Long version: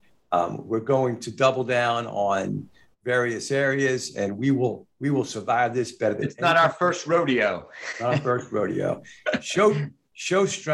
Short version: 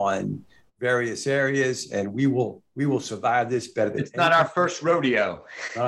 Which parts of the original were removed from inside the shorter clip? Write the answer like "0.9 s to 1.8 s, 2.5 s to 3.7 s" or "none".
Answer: none